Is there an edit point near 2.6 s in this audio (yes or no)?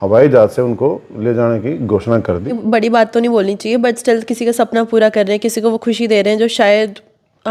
yes